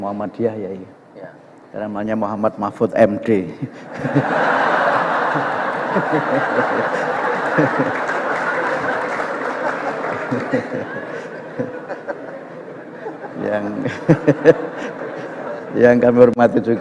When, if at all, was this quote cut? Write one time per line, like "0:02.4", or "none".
none